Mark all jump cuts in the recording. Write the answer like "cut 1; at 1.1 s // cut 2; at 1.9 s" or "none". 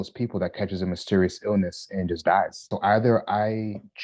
cut 1; at 2.6 s